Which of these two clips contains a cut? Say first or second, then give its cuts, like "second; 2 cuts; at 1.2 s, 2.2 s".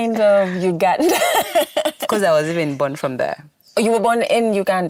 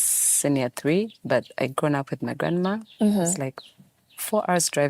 second; 1 cut; at 1.2 s